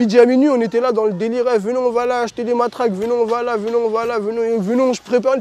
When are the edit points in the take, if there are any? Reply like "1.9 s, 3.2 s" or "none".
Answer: none